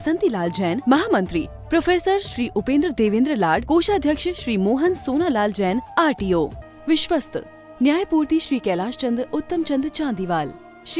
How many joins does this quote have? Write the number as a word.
one